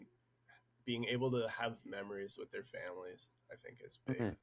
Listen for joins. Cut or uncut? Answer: uncut